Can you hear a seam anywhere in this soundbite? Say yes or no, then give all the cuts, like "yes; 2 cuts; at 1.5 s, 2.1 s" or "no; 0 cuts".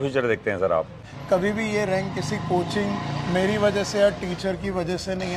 yes; 1 cut; at 1.1 s